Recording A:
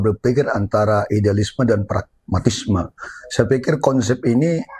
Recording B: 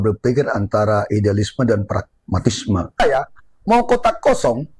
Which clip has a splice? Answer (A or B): B